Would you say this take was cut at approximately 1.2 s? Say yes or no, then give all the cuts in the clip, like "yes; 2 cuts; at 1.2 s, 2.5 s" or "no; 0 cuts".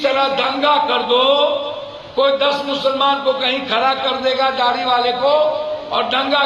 no; 0 cuts